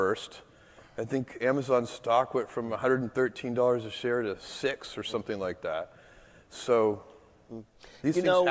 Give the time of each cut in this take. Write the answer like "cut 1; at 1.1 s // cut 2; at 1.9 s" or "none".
none

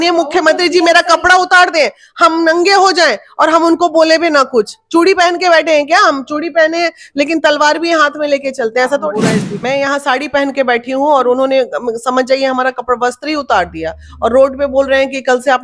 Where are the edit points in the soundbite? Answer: cut 1; at 9.5 s

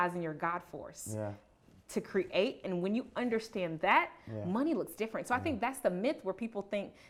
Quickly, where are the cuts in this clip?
none

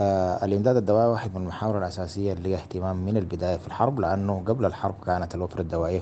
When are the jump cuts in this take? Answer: none

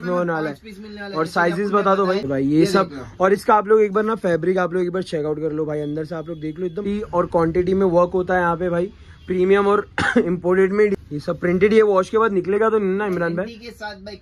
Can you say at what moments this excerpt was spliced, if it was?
cut 1; at 2.3 s // cut 2; at 6.8 s // cut 3; at 10.9 s

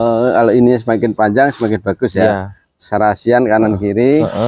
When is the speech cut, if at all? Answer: none

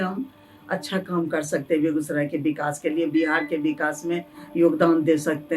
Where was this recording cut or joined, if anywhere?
none

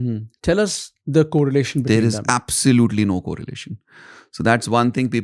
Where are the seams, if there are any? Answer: none

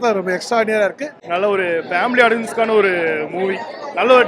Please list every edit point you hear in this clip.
cut 1; at 1.2 s

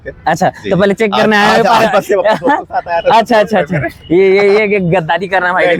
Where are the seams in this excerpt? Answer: none

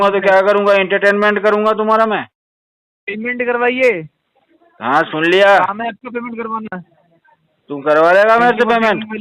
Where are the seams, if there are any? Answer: none

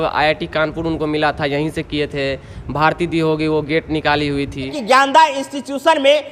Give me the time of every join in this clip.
cut 1; at 4.8 s

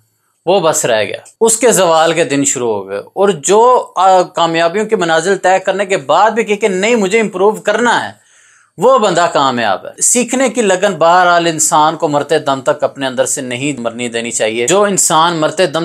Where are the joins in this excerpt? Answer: none

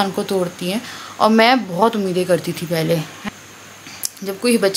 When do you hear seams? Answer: cut 1; at 3.1 s

